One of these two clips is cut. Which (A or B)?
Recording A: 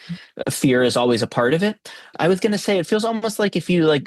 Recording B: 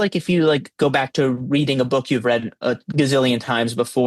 A